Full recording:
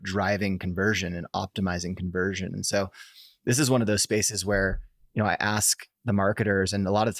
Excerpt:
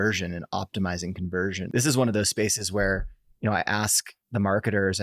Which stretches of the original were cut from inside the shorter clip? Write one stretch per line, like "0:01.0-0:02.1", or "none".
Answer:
0:02.4-0:03.4